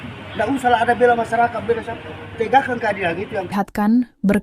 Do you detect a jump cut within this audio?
yes; 1 cut; at 3.5 s

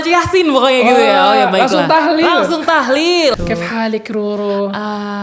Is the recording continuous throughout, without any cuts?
no; 1 cut; at 3.3 s

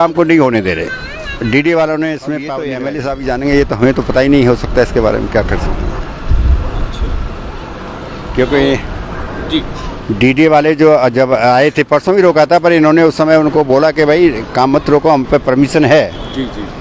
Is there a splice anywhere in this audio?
yes; 1 cut; at 2.8 s

